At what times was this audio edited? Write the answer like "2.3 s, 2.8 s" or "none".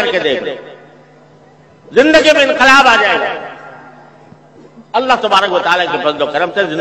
none